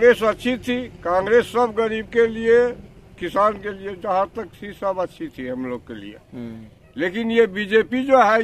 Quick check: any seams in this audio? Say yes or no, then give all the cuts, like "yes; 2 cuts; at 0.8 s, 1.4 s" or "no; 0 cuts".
no; 0 cuts